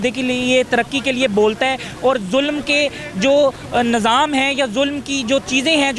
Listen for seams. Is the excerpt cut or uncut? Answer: uncut